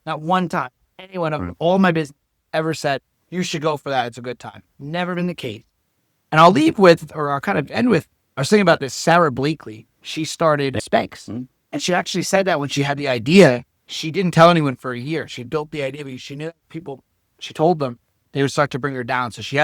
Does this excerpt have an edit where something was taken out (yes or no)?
no